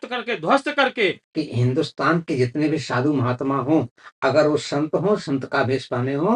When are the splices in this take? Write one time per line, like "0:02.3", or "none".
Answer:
0:01.2